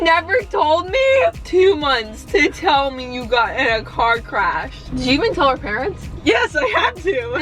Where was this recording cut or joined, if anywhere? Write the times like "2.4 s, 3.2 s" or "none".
1.4 s, 4.8 s